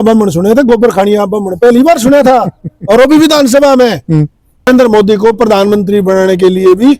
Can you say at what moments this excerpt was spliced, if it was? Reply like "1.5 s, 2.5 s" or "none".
4.7 s